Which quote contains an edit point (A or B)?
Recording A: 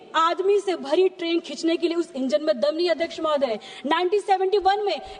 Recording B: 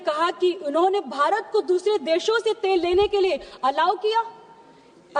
A